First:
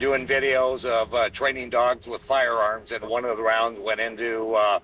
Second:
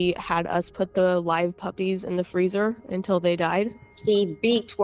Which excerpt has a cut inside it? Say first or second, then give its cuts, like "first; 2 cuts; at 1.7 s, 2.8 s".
first; 1 cut; at 3.1 s